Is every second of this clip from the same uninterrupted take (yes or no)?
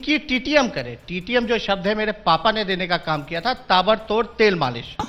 yes